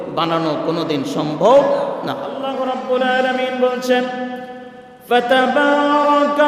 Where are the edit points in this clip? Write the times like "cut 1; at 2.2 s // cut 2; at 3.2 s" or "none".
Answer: cut 1; at 2.4 s